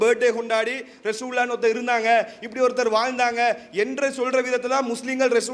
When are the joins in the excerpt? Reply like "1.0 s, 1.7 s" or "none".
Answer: none